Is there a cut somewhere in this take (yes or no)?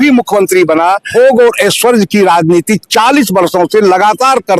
yes